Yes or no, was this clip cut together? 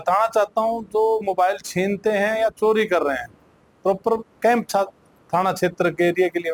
no